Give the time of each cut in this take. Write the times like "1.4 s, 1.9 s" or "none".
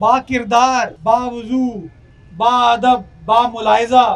1.0 s